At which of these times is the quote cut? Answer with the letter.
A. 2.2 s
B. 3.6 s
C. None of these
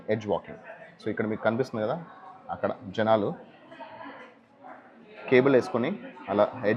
C